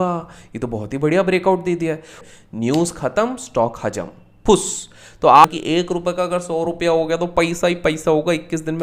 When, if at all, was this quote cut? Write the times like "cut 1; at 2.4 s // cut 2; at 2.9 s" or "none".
cut 1; at 2.1 s // cut 2; at 5.4 s